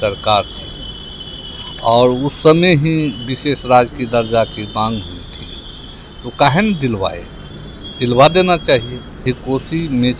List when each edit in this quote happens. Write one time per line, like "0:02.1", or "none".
0:09.2